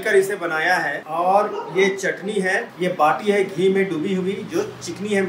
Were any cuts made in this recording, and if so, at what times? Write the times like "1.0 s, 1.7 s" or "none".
1.0 s, 2.7 s